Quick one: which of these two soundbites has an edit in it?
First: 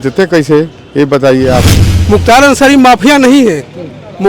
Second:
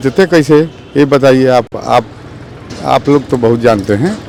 first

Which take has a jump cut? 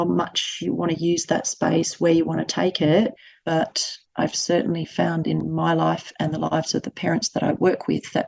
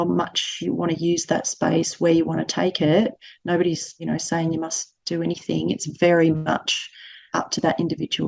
first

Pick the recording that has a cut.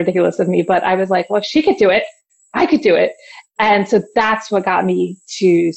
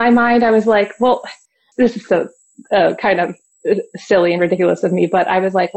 second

